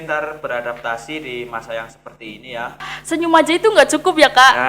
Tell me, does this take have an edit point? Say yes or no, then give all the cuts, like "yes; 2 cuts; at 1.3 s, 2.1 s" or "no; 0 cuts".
yes; 1 cut; at 2.9 s